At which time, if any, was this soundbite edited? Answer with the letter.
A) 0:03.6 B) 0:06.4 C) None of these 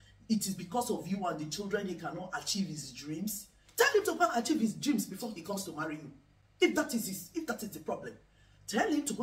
C